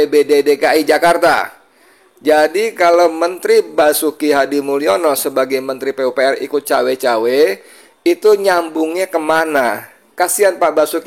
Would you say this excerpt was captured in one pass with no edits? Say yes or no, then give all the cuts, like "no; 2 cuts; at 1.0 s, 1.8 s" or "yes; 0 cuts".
no; 1 cut; at 10.0 s